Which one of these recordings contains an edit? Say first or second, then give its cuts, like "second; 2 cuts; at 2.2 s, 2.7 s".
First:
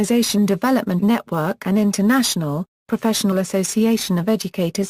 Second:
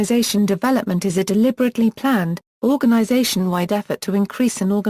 second; 1 cut; at 0.9 s